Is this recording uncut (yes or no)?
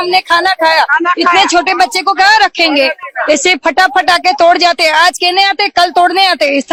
yes